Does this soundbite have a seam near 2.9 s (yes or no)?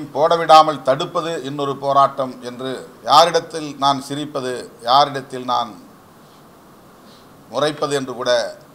yes